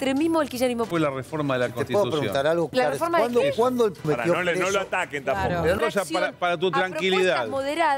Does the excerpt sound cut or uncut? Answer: cut